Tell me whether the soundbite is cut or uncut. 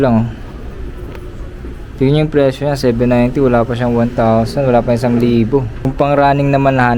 cut